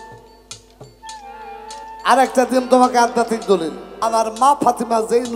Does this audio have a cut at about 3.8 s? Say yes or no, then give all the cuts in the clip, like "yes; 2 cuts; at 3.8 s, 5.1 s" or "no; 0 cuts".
yes; 1 cut; at 3.8 s